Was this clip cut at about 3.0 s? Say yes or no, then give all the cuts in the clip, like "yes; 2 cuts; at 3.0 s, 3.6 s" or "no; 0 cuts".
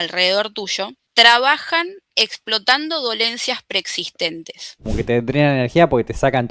no; 2 cuts; at 1.0 s, 4.9 s